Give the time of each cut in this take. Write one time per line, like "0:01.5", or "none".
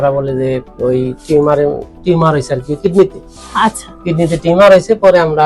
none